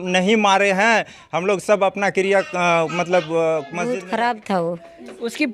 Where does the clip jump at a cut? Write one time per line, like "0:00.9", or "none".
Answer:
0:03.8